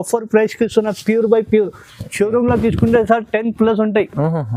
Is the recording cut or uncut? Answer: uncut